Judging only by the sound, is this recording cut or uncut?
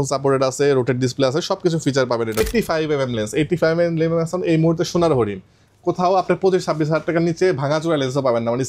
cut